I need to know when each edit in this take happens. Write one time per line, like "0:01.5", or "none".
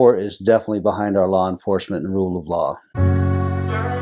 0:02.9

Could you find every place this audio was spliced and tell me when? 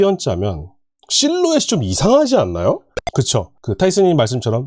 0:03.0

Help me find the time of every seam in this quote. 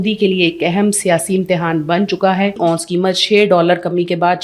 0:02.6

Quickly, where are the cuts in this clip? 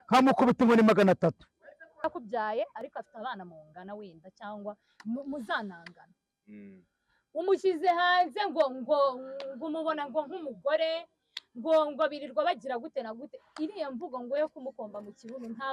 0:02.1

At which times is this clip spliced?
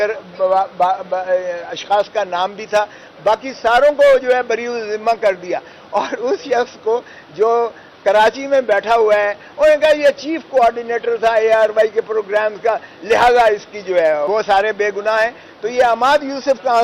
0:14.2

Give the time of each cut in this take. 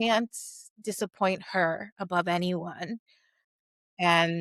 none

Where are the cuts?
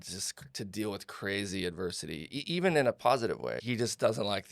0:03.6

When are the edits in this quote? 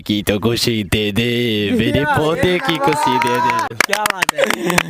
none

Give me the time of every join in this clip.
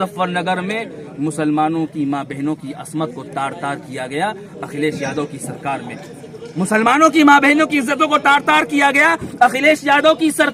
none

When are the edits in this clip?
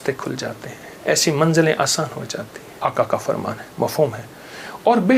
0:02.6

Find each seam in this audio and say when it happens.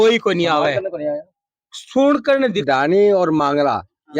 0:02.6

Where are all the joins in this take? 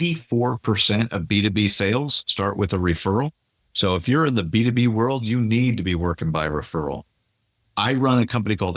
none

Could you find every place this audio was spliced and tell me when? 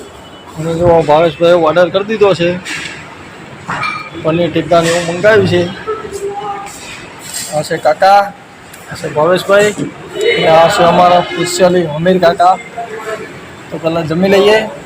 none

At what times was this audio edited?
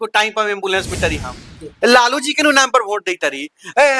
0:01.0

